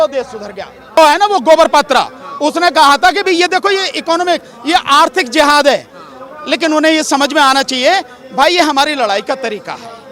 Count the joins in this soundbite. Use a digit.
1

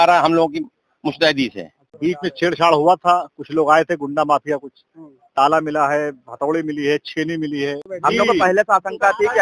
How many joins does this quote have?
2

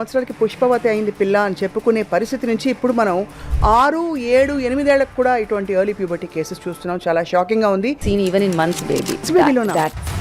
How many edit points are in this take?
2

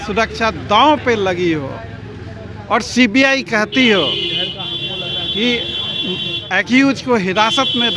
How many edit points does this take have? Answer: 0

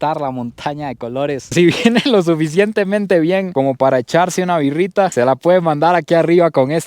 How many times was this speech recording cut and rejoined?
1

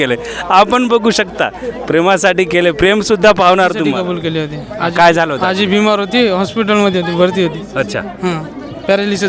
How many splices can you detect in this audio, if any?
1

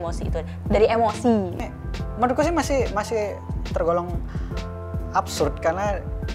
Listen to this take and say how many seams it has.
1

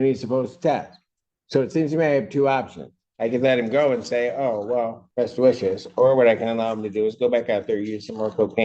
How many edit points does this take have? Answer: 1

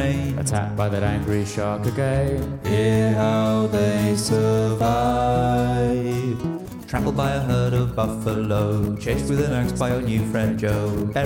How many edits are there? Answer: 0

